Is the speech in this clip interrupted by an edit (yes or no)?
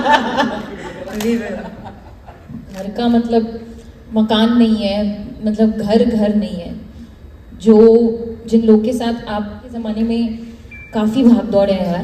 yes